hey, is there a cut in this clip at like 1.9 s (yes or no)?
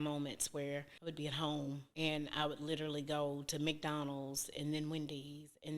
yes